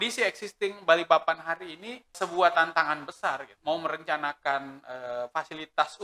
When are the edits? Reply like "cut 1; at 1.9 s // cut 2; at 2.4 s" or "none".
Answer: cut 1; at 2.2 s // cut 2; at 3.5 s